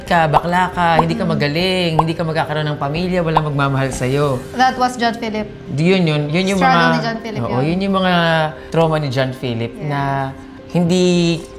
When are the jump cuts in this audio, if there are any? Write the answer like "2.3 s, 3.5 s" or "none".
none